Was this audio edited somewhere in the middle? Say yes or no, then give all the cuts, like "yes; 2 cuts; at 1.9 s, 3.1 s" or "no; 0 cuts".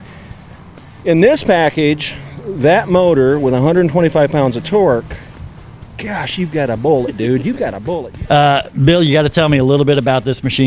yes; 1 cut; at 7.8 s